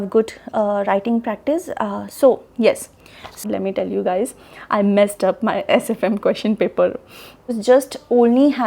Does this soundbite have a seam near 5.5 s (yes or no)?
no